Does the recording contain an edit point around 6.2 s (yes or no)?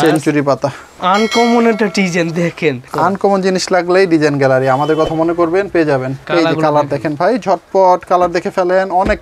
yes